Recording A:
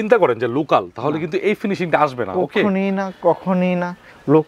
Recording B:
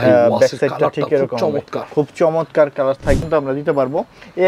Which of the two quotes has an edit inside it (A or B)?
B